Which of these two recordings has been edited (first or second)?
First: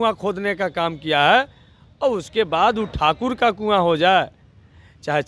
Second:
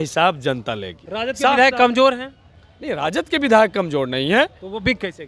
second